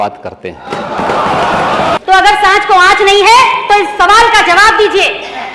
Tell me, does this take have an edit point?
yes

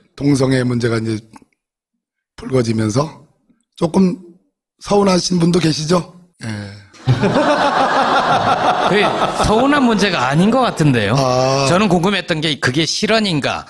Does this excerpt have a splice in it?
yes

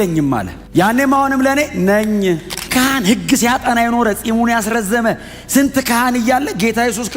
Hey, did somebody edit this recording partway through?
yes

